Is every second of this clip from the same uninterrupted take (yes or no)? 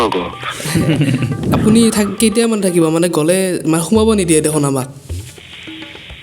no